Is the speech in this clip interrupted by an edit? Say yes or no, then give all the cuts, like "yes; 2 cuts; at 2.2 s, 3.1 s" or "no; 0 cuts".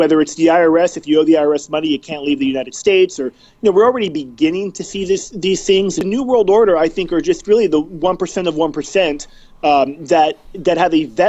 yes; 1 cut; at 6.0 s